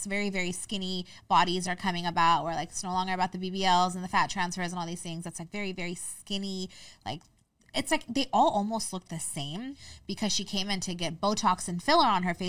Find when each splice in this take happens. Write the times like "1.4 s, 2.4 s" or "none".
9.9 s